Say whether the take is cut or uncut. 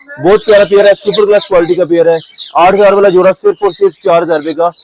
uncut